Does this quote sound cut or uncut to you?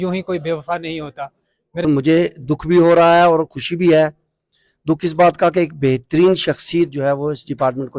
cut